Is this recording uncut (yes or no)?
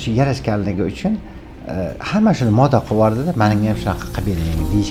yes